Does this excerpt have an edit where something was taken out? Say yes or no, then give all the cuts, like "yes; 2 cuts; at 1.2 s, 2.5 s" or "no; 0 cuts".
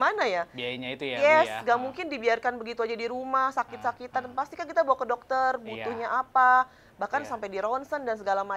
no; 0 cuts